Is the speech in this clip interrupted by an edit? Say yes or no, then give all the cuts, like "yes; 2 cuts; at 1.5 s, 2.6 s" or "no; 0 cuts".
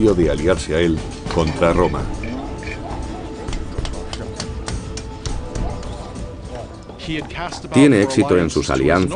no; 0 cuts